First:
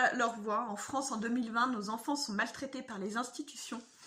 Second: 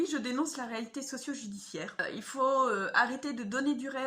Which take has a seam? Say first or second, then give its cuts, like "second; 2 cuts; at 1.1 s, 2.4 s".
second; 1 cut; at 2.0 s